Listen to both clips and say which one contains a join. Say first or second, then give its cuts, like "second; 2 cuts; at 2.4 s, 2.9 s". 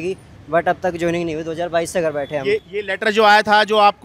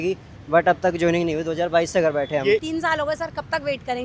second; 1 cut; at 2.7 s